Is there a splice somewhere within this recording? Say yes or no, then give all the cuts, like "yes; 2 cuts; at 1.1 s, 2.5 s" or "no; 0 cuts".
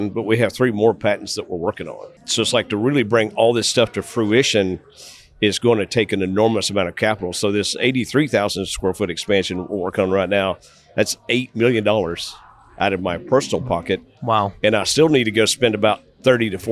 yes; 1 cut; at 2.2 s